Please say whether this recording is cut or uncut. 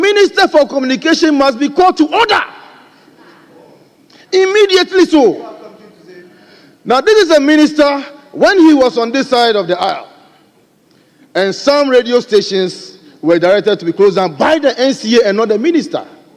uncut